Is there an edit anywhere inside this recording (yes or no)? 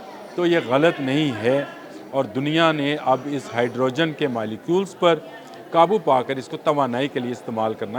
no